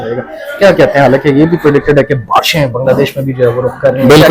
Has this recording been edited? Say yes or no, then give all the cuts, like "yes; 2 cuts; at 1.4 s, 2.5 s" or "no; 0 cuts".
no; 0 cuts